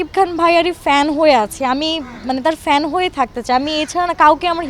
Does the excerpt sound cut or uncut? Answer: uncut